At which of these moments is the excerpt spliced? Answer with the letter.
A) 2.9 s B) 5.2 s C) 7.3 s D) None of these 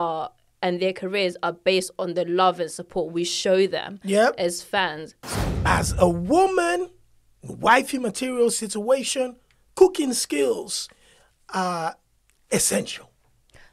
B